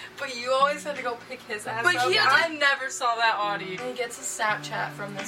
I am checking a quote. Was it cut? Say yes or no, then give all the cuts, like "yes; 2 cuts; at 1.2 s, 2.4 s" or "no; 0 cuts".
yes; 1 cut; at 3.7 s